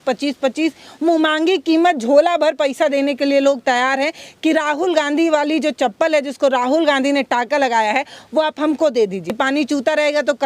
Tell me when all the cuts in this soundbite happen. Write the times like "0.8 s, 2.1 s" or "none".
9.2 s